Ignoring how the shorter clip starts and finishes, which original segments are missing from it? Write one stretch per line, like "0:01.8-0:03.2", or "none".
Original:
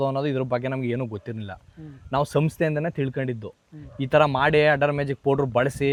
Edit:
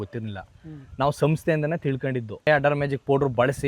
0:03.6-0:04.6